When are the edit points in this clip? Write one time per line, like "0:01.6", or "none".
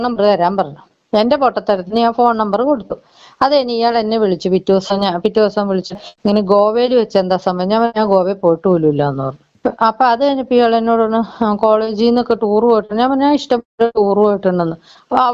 0:05.9